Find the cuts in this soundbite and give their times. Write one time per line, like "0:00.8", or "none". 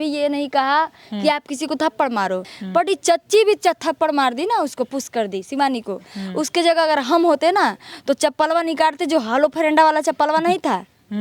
0:02.5